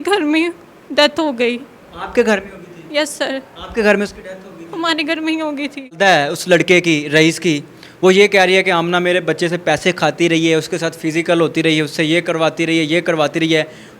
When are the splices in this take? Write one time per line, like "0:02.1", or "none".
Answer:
0:06.0